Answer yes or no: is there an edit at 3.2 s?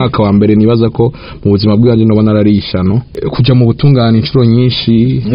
yes